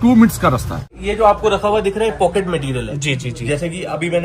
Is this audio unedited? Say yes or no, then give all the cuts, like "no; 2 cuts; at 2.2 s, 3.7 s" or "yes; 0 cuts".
no; 1 cut; at 0.9 s